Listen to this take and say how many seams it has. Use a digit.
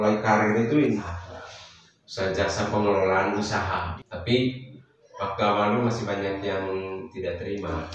2